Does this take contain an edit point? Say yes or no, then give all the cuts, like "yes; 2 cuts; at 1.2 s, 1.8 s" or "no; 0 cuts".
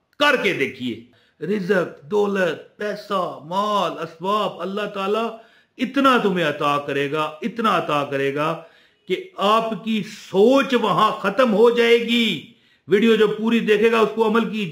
yes; 1 cut; at 1.1 s